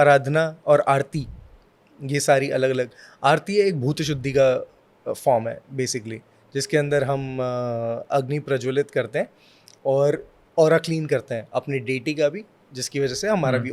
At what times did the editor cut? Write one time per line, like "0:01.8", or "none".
none